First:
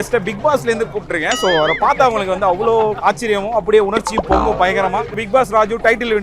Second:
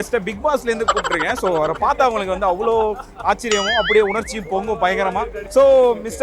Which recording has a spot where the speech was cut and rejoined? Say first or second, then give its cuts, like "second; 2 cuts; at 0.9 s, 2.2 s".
first; 2 cuts; at 3.0 s, 5.2 s